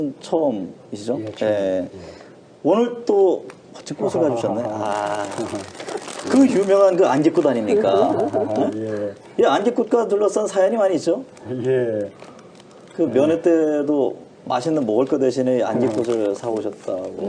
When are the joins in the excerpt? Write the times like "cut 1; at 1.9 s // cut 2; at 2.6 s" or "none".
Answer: cut 1; at 12.2 s